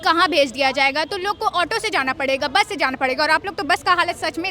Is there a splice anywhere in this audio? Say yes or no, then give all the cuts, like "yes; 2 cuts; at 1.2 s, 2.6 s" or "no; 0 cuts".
no; 0 cuts